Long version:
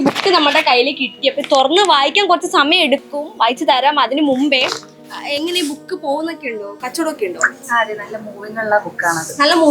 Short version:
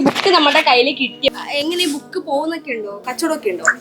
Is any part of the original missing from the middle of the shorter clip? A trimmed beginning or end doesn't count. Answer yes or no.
yes